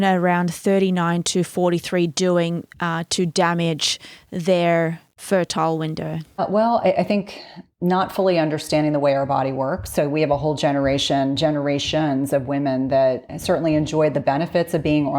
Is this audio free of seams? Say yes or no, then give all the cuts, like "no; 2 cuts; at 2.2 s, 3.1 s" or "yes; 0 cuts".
no; 2 cuts; at 6.4 s, 13.3 s